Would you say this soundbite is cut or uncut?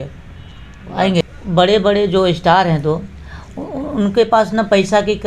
cut